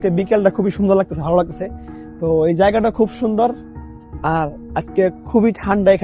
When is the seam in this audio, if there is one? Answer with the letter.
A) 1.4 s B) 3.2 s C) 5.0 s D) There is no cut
D